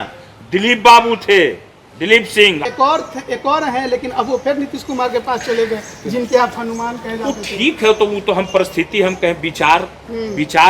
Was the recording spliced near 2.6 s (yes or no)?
yes